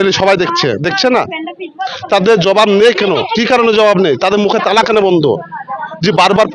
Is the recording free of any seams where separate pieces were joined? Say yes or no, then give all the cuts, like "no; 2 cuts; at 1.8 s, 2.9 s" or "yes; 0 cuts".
yes; 0 cuts